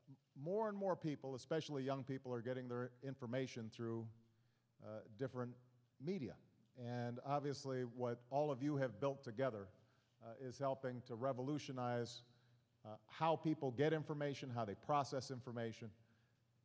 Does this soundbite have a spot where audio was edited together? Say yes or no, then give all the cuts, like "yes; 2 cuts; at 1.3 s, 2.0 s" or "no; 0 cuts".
no; 0 cuts